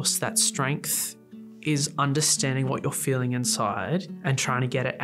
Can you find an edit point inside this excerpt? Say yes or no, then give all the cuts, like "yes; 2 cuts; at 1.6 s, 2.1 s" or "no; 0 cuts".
no; 0 cuts